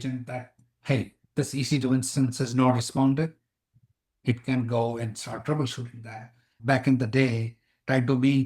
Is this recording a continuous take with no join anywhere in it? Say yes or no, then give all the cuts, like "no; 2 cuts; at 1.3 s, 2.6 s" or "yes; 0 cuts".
no; 1 cut; at 6.5 s